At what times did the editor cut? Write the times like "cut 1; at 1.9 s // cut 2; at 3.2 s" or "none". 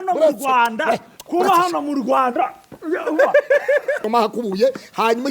cut 1; at 4.1 s